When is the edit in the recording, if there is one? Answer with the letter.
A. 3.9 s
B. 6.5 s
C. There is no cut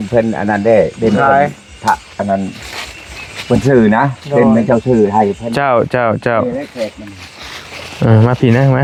C